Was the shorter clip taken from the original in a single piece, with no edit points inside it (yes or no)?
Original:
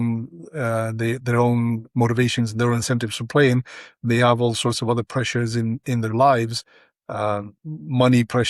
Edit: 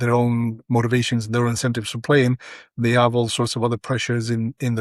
yes